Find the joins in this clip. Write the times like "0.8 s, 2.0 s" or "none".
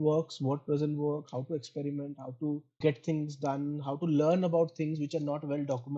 none